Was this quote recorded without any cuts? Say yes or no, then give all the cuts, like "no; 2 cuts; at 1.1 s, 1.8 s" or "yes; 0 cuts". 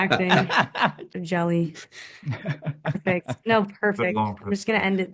no; 1 cut; at 1.1 s